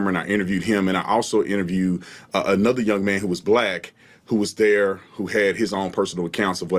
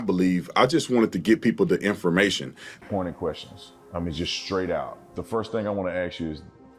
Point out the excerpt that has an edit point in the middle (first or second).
second